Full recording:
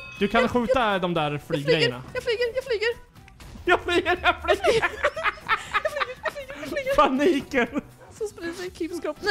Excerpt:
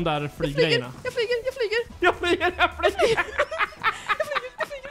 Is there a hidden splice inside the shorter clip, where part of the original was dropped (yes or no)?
yes